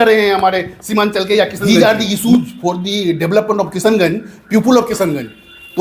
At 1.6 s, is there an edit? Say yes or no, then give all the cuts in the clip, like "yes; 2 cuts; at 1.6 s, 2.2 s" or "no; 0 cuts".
yes; 1 cut; at 1.6 s